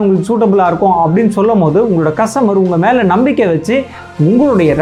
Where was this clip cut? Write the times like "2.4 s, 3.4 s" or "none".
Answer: none